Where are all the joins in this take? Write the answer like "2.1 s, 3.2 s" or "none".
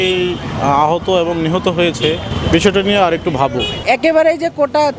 2.3 s, 3.7 s